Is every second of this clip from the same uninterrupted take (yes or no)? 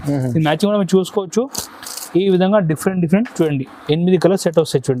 yes